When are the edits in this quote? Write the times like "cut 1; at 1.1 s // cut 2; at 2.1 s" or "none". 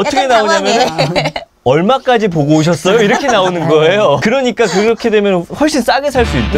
cut 1; at 4.2 s

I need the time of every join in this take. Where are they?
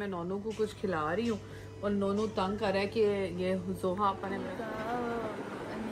cut 1; at 4.4 s

